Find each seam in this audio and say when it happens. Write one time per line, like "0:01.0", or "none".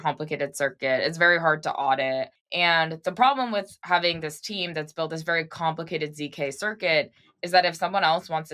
0:02.4
0:03.8